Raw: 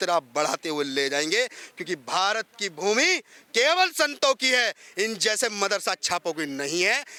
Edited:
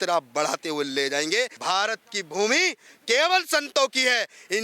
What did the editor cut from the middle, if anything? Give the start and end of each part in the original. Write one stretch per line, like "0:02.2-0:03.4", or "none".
0:01.6-0:02.0